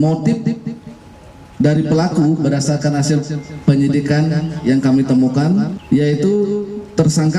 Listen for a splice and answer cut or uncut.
cut